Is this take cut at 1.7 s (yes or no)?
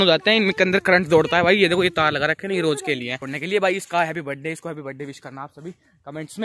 no